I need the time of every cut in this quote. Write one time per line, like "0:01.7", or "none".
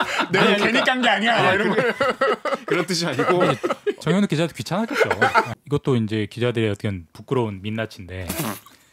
0:05.6